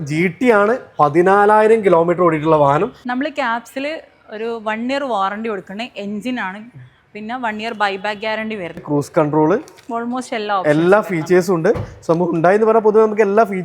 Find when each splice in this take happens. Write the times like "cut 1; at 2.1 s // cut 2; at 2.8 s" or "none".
cut 1; at 3.0 s // cut 2; at 8.8 s